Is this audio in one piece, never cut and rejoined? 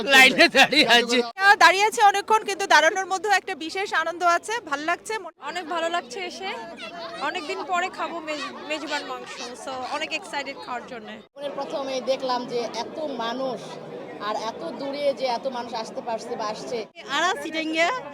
no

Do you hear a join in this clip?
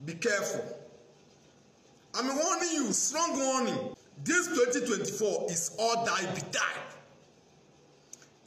yes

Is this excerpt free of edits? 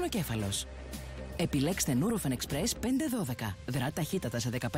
yes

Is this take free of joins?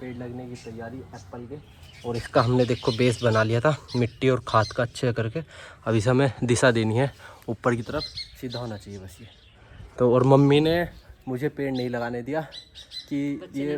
yes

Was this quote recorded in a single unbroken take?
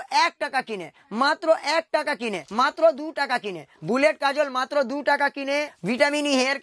no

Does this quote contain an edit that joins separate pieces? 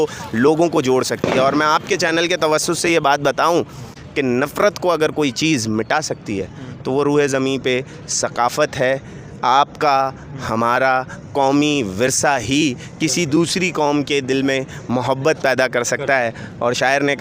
no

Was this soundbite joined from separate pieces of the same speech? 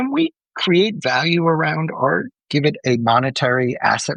no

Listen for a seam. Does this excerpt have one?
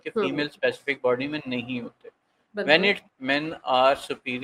yes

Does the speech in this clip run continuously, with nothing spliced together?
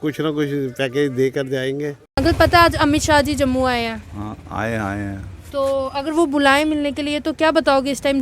no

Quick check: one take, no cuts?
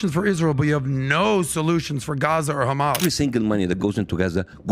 no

